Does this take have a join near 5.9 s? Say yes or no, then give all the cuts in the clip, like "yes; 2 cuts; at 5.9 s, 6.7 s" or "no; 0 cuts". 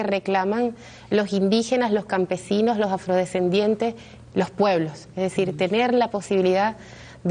yes; 1 cut; at 5.9 s